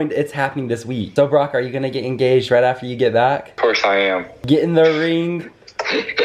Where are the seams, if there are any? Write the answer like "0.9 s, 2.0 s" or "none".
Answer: 1.1 s